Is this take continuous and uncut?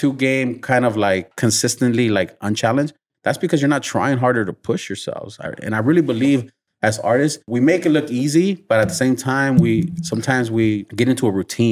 no; 3 cuts; at 1.3 s, 7.5 s, 10.9 s

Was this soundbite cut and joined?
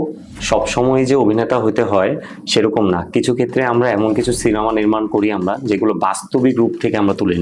no; 0 cuts

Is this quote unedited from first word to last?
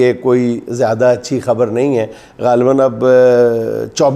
yes; 0 cuts

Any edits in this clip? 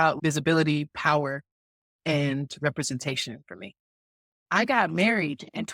yes; 1 cut; at 4.3 s

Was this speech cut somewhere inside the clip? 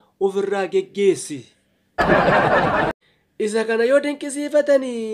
yes; 1 cut; at 2.9 s

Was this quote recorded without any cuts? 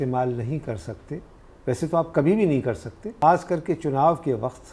no; 1 cut; at 3.1 s

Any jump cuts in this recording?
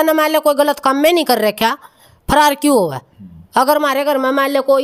no; 0 cuts

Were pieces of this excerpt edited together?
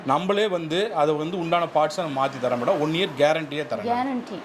no; 0 cuts

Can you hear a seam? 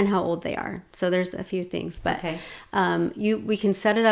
no; 0 cuts

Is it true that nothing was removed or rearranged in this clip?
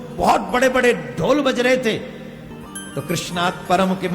no; 1 cut; at 2.5 s

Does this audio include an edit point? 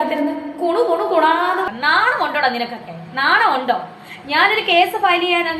yes; 1 cut; at 1.7 s

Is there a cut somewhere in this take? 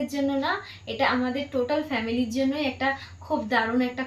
no; 0 cuts

